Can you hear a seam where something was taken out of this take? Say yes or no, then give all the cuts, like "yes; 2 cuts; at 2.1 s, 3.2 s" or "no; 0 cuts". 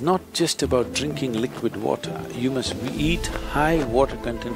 no; 0 cuts